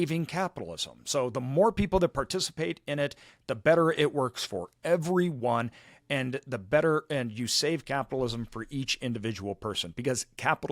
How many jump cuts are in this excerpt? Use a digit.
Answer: 0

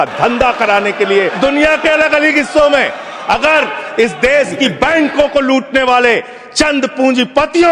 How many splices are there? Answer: 1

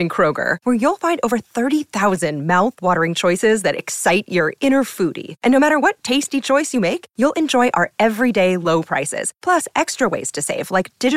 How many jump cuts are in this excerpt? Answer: 0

